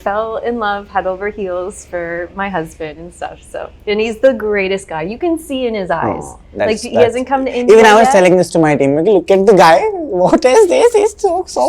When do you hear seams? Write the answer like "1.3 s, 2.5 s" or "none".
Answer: none